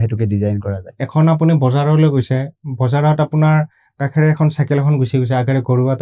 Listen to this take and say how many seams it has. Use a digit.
1